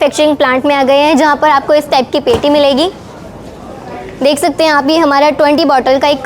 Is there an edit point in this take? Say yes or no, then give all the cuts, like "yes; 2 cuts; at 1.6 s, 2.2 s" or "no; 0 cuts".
no; 0 cuts